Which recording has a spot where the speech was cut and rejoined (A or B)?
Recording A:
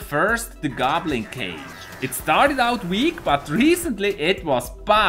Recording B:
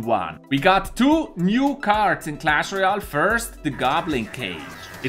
A